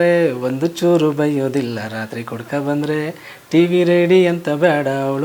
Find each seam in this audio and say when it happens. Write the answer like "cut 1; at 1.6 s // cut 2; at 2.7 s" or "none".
none